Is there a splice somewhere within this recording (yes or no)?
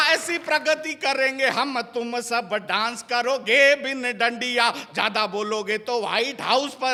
no